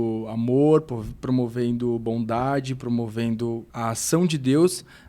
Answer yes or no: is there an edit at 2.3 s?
no